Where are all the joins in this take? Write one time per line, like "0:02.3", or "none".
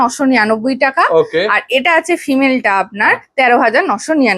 none